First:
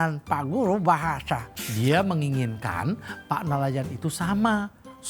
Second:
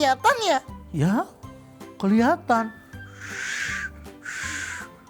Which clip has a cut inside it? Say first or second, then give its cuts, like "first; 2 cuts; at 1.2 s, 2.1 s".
first; 1 cut; at 1.6 s